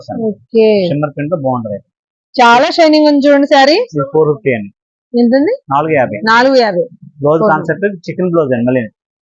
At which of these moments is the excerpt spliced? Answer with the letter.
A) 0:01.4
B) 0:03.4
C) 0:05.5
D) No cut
D